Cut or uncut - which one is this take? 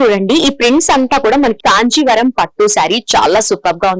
cut